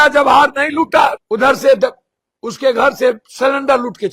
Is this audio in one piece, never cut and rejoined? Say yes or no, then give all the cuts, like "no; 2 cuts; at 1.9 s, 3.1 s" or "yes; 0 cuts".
no; 1 cut; at 1.2 s